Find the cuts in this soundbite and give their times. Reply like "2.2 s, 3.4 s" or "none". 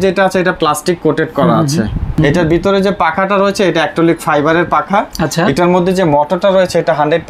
2.2 s